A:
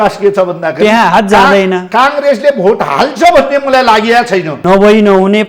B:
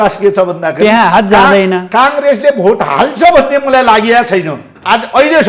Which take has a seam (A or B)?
A